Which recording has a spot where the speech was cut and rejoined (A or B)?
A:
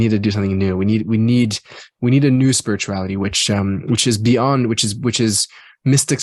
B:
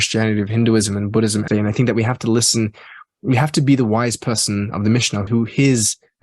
B